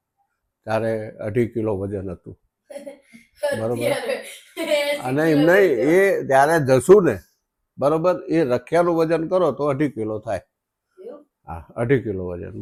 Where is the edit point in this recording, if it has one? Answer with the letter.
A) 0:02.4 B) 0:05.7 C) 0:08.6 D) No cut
D